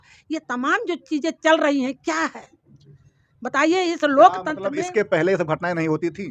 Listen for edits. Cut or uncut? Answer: uncut